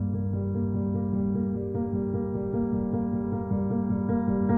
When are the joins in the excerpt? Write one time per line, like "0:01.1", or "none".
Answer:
none